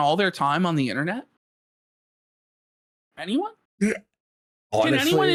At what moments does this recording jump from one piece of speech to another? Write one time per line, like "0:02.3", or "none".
none